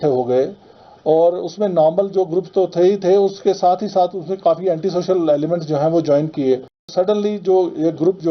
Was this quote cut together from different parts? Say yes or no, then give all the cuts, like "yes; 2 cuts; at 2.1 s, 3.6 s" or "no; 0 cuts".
yes; 1 cut; at 6.9 s